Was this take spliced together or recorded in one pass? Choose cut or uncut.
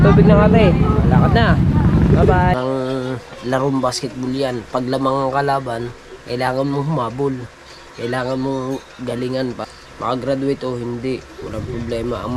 cut